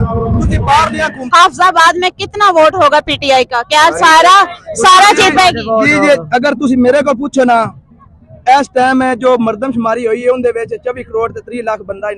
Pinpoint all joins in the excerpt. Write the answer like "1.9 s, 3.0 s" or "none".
1.2 s